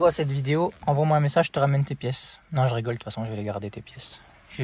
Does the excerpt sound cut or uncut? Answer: uncut